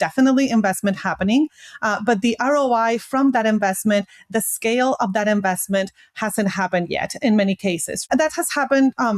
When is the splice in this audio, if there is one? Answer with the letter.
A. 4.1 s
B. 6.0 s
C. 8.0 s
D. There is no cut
C